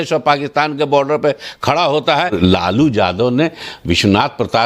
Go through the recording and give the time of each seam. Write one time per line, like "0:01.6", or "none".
0:02.3